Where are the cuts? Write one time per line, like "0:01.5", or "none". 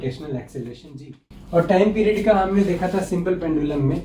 0:01.0